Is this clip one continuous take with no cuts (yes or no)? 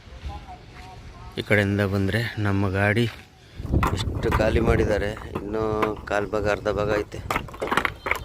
no